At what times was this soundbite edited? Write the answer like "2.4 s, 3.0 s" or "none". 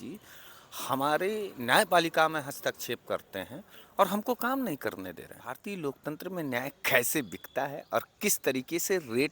5.4 s

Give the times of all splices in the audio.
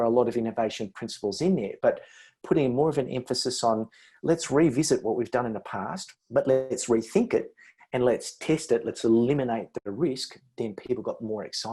none

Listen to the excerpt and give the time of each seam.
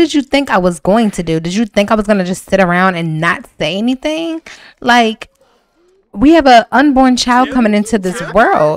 none

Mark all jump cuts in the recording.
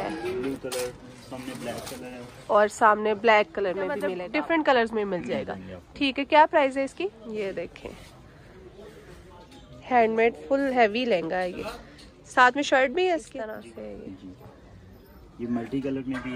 4.2 s, 7.2 s, 13.3 s

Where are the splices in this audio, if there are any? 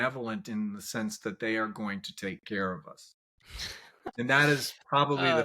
3.9 s

